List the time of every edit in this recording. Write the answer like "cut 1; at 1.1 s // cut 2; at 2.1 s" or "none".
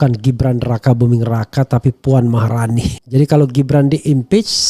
cut 1; at 2.9 s